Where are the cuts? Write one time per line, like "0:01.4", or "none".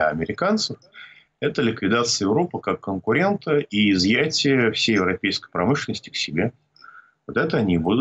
none

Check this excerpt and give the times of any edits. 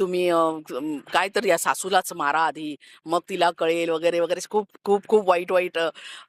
none

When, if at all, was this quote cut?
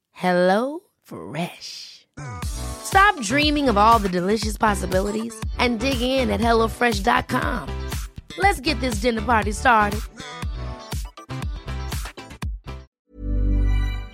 0:13.0

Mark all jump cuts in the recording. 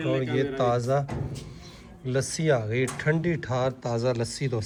none

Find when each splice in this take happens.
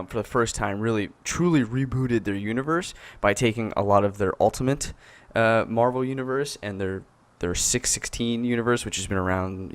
0:01.8

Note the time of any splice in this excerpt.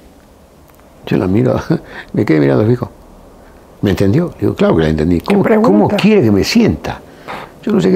none

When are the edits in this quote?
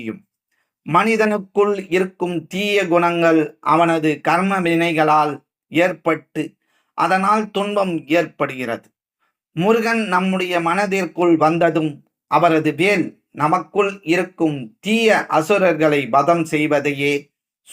none

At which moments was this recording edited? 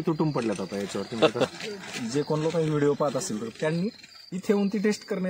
0:01.5

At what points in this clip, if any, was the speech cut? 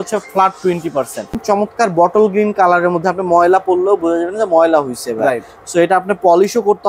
0:01.4

